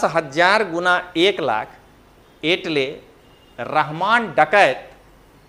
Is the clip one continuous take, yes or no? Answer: yes